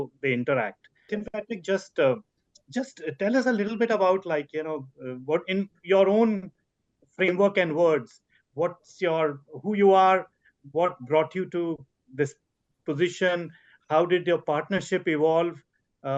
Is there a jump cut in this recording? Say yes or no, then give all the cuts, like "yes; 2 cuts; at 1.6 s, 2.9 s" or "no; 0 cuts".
yes; 1 cut; at 1.2 s